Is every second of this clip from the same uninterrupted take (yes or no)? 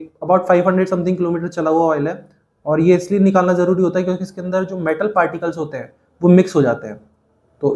yes